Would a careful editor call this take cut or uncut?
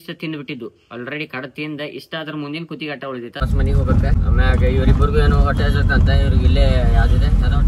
cut